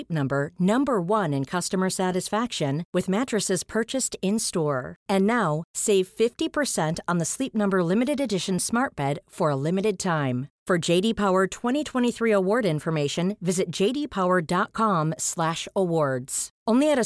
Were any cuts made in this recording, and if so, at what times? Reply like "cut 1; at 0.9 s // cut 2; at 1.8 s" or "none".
none